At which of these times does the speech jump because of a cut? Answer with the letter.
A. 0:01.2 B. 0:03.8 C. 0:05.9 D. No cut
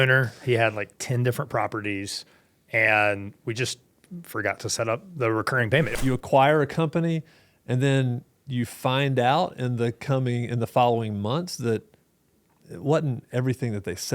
C